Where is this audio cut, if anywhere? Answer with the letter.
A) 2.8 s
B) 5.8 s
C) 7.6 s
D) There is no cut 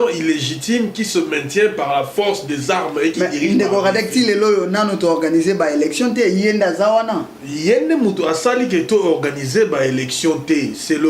D